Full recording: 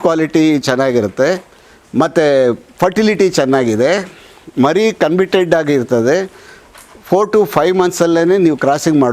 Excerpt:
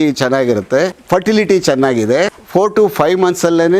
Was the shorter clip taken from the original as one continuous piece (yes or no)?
no